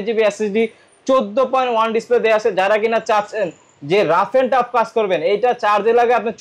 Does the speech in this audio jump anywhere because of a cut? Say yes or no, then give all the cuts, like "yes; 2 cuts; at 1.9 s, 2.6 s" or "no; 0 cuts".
no; 0 cuts